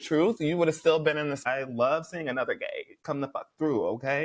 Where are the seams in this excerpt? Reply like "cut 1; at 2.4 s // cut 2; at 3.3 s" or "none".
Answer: cut 1; at 1.4 s // cut 2; at 2.9 s